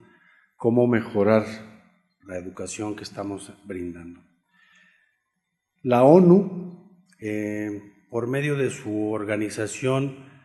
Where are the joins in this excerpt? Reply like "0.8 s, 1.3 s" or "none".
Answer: 7.6 s